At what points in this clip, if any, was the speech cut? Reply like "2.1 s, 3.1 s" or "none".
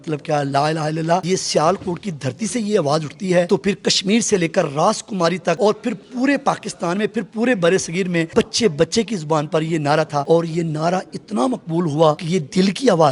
1.2 s, 3.5 s, 5.6 s, 8.3 s, 10.2 s, 12.2 s

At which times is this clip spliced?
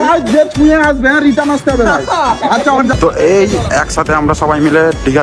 2.9 s

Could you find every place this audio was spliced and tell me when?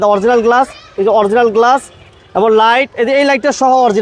none

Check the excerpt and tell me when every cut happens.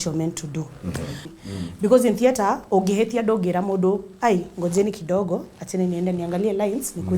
1.3 s

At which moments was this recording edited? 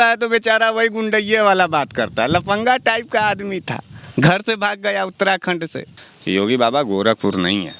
5.9 s

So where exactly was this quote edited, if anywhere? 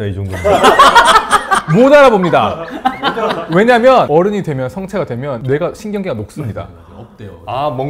none

